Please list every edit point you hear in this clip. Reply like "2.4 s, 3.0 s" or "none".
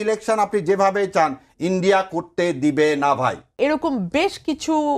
3.5 s